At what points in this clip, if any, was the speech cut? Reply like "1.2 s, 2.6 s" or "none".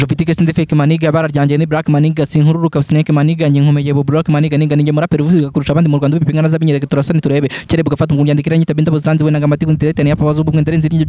none